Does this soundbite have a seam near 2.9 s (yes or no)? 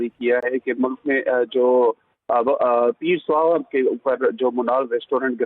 no